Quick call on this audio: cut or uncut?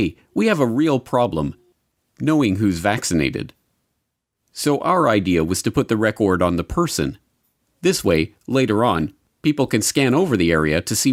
uncut